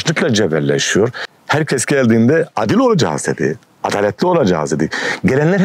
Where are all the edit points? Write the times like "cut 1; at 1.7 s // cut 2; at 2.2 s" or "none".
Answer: cut 1; at 1.2 s

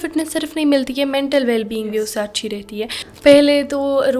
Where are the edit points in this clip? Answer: cut 1; at 3.0 s

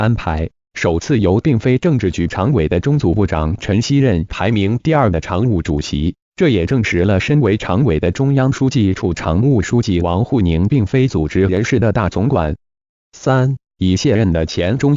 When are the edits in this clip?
cut 1; at 3.7 s

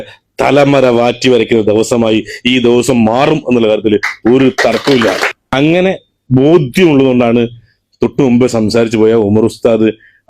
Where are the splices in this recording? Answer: cut 1; at 5.3 s

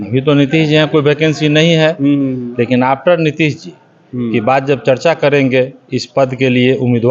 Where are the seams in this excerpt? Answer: none

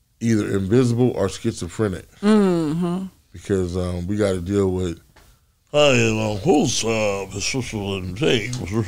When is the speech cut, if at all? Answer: none

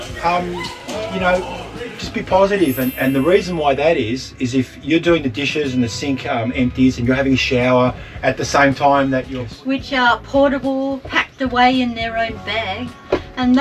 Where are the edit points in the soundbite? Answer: cut 1; at 2.9 s // cut 2; at 9.4 s

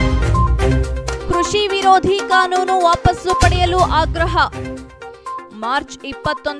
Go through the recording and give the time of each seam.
cut 1; at 1.1 s

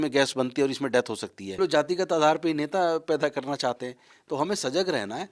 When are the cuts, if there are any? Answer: cut 1; at 1.5 s

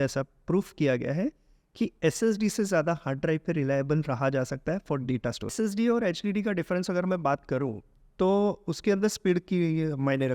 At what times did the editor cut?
cut 1; at 5.5 s

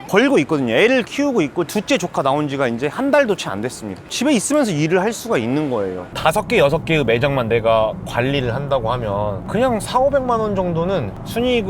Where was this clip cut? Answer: cut 1; at 4.1 s // cut 2; at 6.1 s

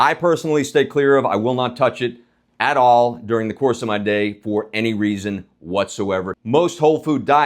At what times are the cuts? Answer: cut 1; at 6.4 s

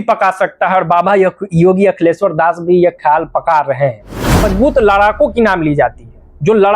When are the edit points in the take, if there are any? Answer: cut 1; at 4.5 s

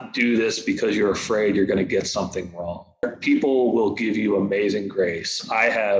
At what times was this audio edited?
cut 1; at 3.1 s

